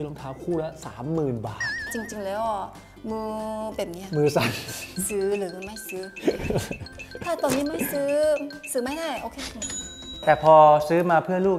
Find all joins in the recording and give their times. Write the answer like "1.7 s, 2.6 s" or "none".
1.9 s, 10.2 s